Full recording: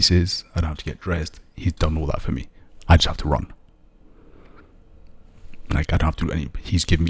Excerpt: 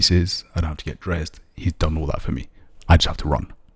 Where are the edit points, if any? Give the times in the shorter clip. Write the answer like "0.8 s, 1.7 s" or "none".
none